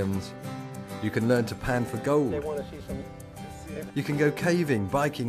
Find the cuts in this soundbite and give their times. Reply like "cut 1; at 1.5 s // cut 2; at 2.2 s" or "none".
none